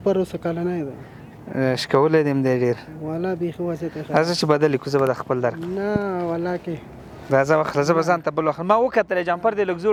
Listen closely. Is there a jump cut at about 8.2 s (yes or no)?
no